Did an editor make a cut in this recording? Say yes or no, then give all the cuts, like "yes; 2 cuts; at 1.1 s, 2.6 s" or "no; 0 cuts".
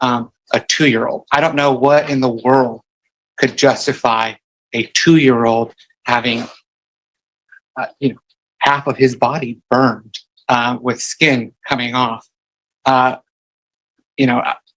no; 0 cuts